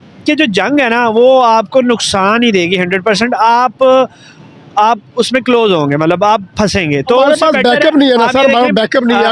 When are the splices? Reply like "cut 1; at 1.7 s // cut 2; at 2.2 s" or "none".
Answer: none